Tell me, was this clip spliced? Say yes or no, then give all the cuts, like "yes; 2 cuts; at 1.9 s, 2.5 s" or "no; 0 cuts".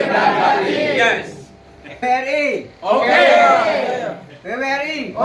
yes; 1 cut; at 2.0 s